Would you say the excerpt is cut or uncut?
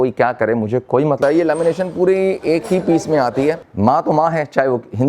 cut